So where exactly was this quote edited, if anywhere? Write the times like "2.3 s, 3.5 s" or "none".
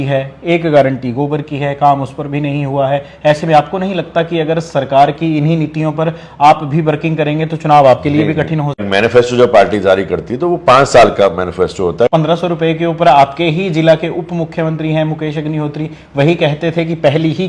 8.9 s, 12.1 s